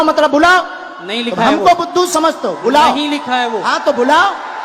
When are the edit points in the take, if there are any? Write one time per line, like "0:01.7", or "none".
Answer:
none